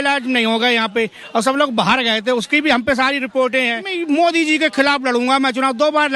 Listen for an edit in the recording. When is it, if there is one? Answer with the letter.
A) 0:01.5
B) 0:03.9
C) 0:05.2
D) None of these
B